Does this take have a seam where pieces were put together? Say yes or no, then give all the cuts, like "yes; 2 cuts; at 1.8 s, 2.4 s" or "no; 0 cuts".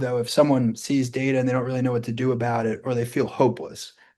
no; 0 cuts